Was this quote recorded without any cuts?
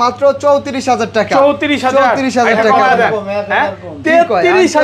yes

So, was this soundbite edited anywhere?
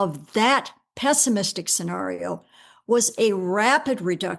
no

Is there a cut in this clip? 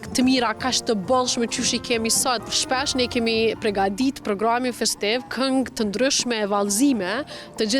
yes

